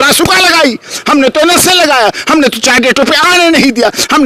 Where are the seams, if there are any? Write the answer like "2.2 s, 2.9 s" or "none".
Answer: none